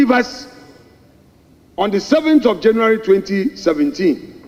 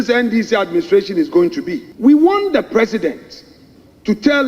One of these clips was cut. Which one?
second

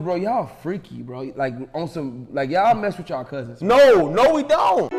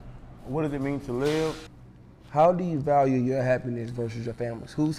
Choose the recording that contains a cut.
second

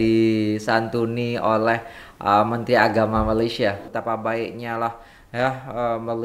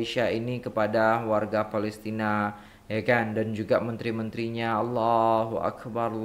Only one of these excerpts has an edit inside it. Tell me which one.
first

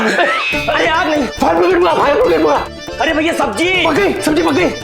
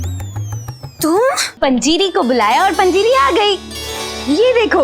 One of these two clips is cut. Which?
second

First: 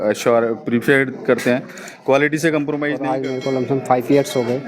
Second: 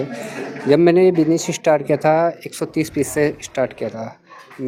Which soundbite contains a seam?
first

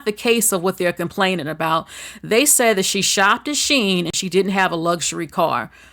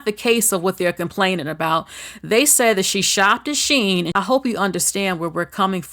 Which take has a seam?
second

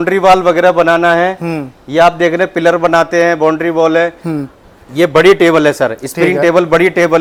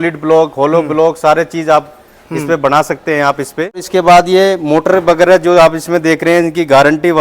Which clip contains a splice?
second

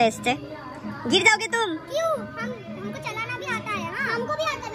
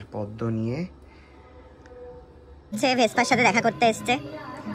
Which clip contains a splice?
second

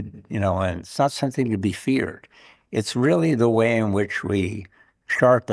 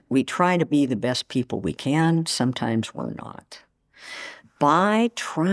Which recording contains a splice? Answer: second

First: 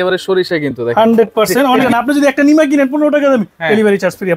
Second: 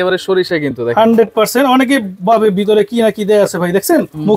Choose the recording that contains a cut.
first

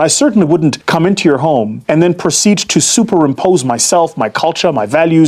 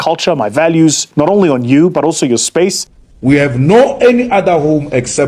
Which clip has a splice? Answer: second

